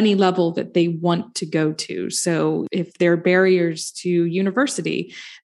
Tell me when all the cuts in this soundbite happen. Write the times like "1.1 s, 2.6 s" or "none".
2.7 s